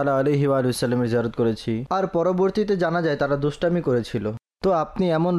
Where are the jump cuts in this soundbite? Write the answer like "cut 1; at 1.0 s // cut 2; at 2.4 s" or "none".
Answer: none